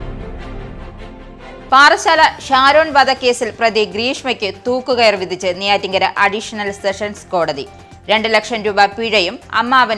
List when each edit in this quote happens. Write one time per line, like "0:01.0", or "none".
0:01.6